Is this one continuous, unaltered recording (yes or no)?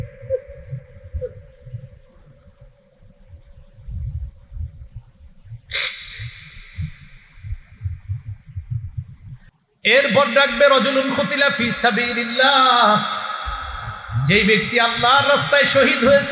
no